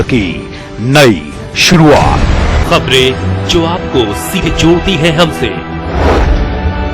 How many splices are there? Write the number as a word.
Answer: one